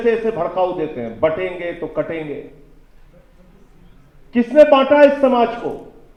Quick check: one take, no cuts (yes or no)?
yes